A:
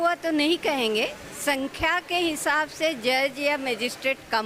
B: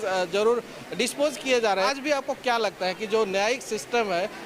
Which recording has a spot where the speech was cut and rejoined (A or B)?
B